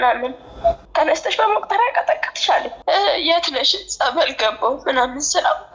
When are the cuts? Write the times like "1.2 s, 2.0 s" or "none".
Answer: 0.8 s, 2.7 s